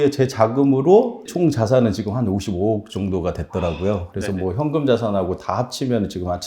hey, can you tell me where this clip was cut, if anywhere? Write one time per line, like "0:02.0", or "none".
0:01.3